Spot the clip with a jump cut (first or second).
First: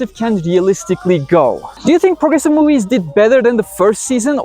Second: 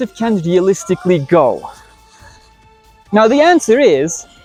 first